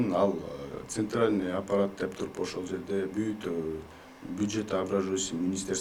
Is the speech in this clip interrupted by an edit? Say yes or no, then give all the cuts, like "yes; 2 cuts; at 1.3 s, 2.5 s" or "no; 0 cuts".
no; 0 cuts